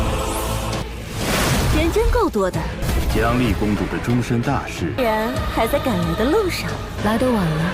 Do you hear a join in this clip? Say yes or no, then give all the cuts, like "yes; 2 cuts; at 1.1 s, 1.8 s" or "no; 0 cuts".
no; 0 cuts